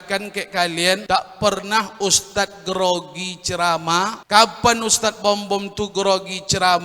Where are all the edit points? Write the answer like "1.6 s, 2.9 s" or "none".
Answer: 1.0 s, 4.2 s

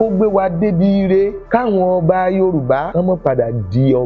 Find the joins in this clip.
1.4 s, 2.9 s

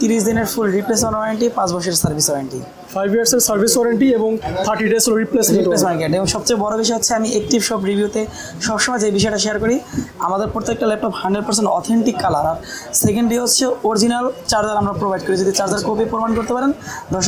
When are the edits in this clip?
none

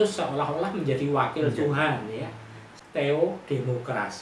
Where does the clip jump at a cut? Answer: 2.7 s

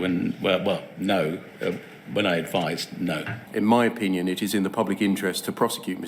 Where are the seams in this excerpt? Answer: 3.4 s

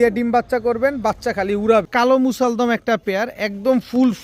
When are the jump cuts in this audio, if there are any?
1.9 s

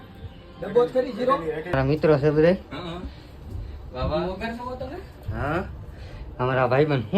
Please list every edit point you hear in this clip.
1.8 s

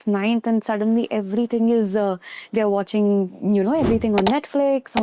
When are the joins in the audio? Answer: none

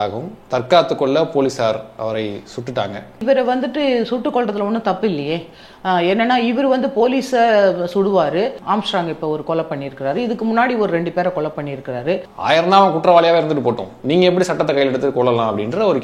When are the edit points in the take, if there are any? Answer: 3.2 s, 8.6 s, 12.3 s

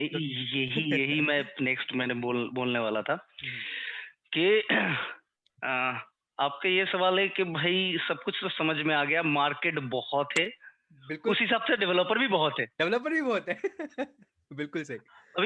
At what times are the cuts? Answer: none

